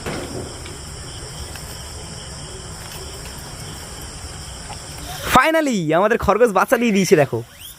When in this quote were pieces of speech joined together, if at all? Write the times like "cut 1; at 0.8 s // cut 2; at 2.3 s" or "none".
cut 1; at 5.1 s